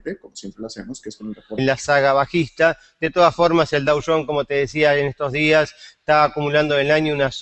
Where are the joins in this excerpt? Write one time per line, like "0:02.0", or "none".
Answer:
none